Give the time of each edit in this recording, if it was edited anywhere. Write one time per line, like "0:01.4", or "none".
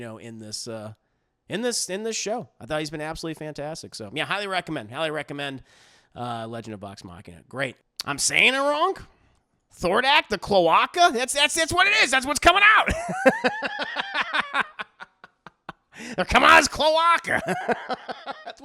0:07.9